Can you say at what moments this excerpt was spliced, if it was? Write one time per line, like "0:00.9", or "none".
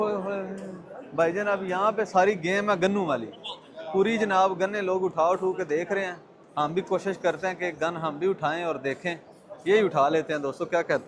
none